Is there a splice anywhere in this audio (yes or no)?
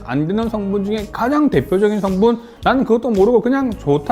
yes